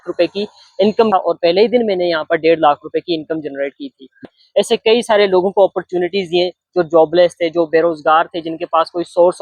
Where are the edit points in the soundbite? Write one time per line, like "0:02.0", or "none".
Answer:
0:01.1
0:04.3

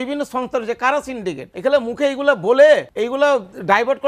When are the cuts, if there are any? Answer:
0:01.5
0:02.9

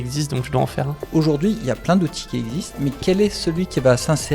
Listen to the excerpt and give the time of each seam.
0:01.0
0:02.8

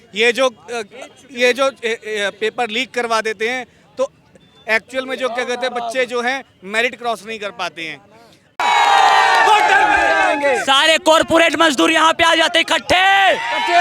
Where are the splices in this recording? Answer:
0:08.6

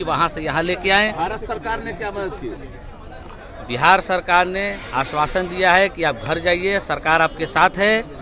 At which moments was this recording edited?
none

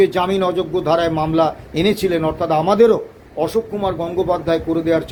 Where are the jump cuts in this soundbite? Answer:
none

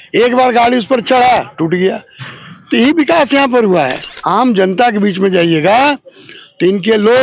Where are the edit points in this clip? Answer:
0:04.1

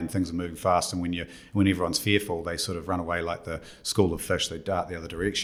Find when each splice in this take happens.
none

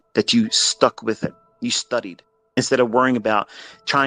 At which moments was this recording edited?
0:01.5
0:02.6

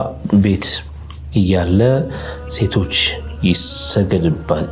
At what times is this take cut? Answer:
none

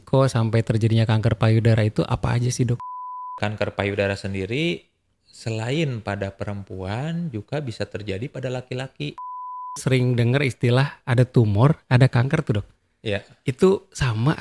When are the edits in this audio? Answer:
0:03.4
0:09.8

